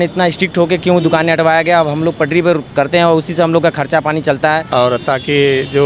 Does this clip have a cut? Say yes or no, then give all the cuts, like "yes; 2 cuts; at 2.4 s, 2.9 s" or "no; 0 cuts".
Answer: yes; 1 cut; at 4.7 s